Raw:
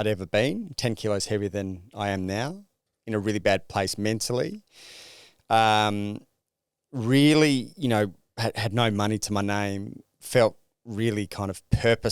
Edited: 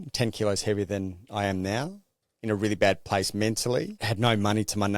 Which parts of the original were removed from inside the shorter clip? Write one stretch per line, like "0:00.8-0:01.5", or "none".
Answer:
0:04.7-0:08.6